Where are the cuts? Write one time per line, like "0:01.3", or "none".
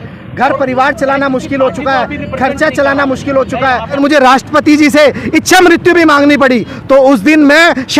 0:04.0
0:06.7